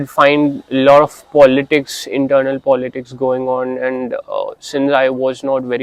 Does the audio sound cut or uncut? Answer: uncut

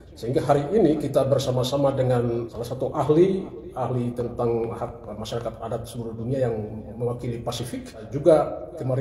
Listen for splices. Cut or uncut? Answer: cut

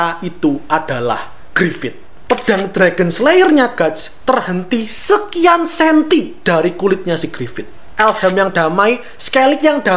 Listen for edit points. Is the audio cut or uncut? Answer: cut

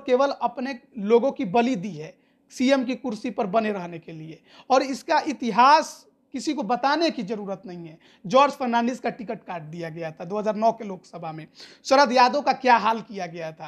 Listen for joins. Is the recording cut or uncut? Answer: uncut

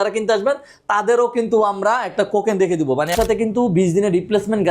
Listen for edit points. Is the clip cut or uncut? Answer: cut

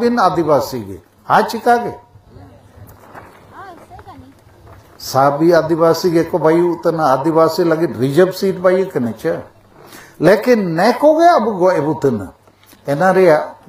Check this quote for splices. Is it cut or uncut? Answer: uncut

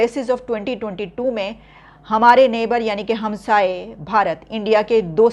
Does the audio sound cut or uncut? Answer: uncut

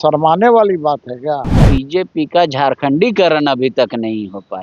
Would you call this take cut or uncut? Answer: cut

